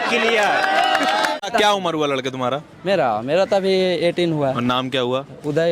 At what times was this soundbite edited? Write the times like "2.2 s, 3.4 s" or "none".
1.5 s